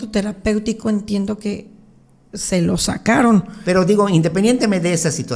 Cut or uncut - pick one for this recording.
cut